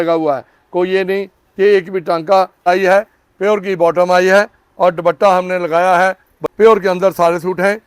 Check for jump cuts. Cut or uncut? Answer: cut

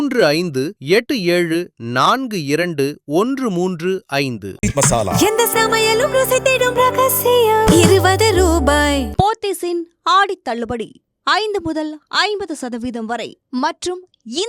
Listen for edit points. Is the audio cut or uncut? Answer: cut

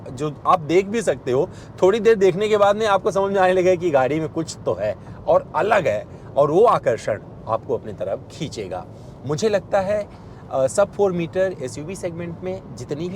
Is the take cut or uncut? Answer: uncut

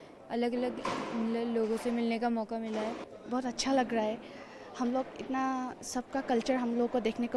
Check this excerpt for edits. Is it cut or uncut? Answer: cut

